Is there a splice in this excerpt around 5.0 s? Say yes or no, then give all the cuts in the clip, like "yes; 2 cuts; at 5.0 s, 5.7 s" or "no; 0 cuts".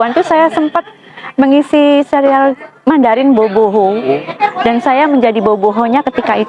no; 0 cuts